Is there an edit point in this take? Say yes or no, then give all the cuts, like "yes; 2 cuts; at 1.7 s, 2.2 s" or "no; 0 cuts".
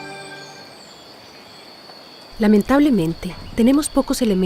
no; 0 cuts